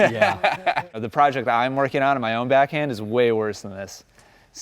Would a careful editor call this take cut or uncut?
cut